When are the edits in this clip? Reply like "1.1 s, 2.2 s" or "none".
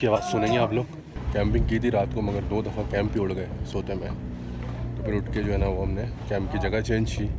1.2 s